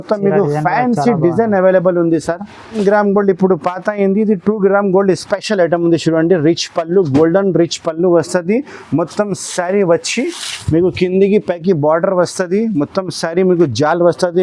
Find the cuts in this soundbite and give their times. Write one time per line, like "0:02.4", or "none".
0:02.7